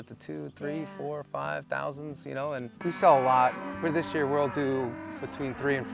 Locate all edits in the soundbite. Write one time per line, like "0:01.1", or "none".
0:02.7